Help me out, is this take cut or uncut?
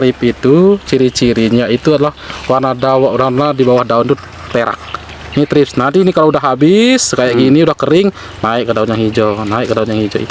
uncut